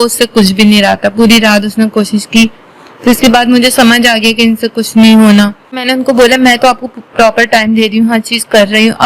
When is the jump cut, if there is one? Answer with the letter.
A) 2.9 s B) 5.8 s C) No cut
B